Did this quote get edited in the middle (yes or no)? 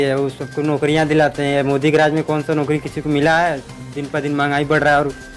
no